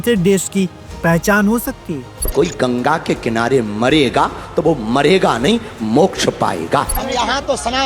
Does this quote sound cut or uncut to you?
cut